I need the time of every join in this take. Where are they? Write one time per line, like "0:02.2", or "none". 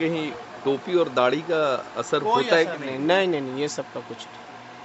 none